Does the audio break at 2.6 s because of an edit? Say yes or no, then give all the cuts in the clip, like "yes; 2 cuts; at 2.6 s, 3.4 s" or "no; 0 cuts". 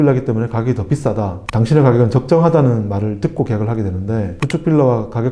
no; 2 cuts; at 1.4 s, 4.4 s